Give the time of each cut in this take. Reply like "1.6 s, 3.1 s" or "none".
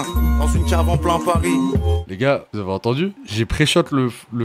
none